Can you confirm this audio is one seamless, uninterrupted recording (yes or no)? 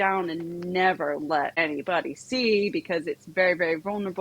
no